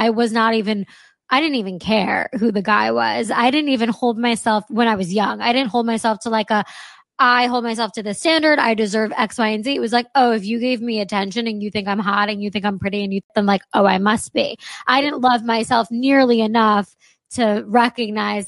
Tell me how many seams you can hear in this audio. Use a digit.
1